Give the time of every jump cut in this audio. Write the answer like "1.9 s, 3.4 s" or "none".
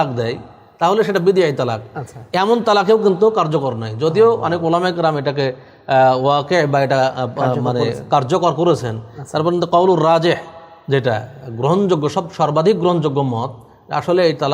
none

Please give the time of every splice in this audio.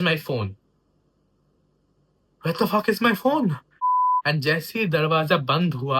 4.1 s

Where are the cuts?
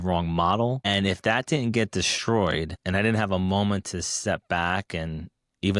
0.8 s, 2.8 s

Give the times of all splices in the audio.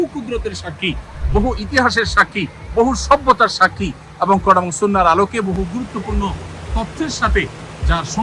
none

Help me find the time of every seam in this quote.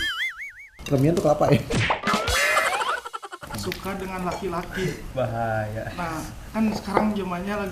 3.4 s, 5.0 s

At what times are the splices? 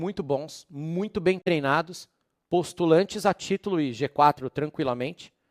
none

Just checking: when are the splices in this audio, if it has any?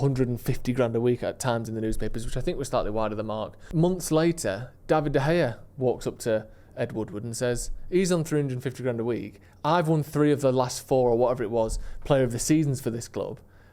3.6 s

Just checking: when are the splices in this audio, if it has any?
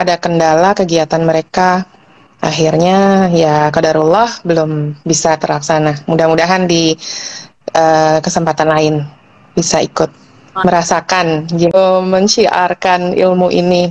11.7 s

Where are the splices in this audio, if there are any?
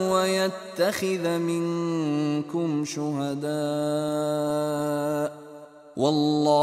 none

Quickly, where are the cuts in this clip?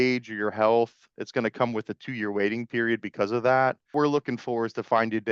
3.9 s

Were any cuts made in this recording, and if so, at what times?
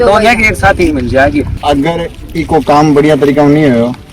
1.6 s

